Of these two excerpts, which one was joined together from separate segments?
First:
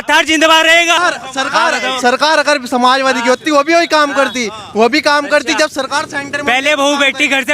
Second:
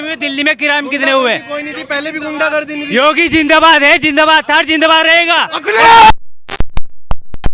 first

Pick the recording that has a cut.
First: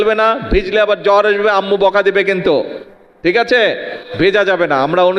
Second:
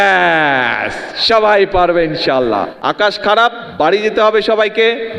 second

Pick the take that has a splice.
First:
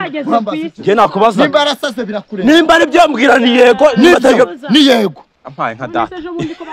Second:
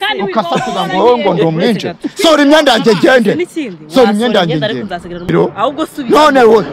second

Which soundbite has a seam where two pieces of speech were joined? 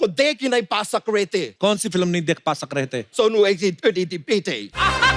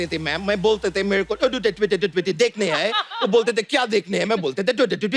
first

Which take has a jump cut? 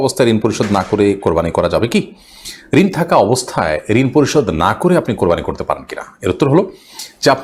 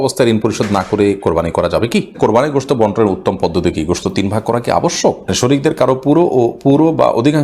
second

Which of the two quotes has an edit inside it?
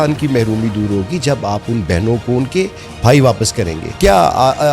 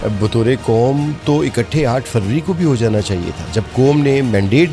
first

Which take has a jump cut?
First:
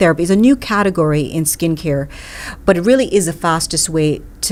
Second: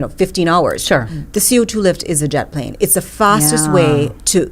second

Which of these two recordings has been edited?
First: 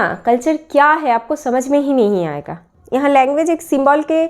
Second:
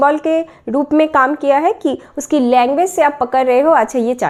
first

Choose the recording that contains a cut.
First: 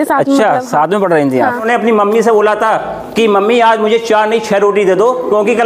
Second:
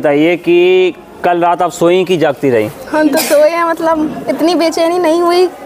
first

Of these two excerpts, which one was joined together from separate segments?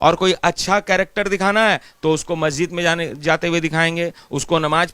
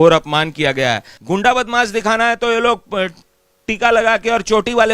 second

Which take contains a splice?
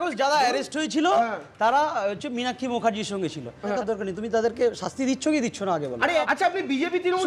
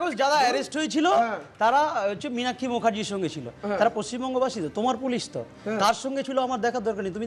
first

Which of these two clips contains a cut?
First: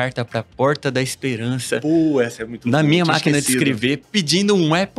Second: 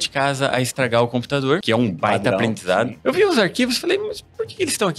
second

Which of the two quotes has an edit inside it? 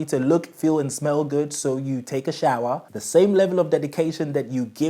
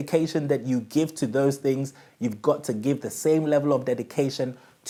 first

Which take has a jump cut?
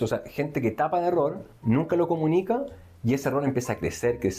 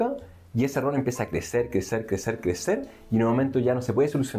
first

